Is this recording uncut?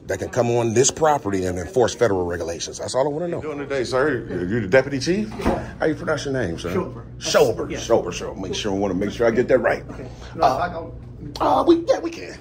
no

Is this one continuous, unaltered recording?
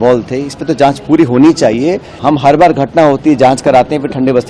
no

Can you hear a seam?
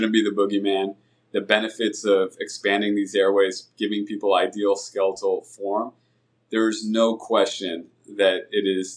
no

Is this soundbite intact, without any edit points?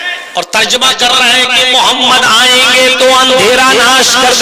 yes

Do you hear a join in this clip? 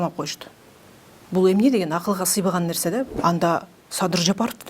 yes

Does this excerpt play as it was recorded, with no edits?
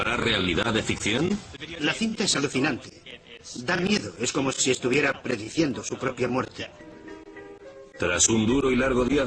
no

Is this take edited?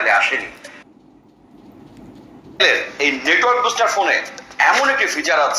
no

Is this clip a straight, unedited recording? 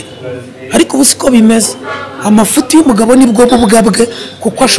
yes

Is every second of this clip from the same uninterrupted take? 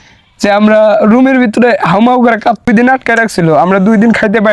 no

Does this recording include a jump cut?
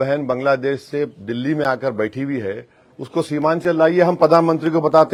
no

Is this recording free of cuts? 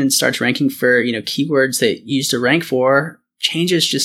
yes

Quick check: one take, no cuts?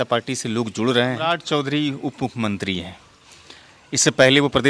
no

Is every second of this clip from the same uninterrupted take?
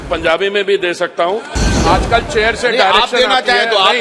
no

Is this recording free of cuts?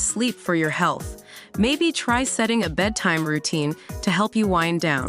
yes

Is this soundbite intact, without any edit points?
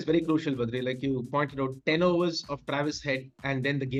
yes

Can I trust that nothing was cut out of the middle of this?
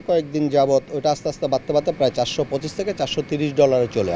yes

